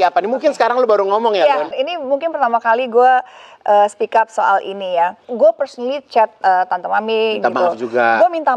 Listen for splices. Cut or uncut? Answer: cut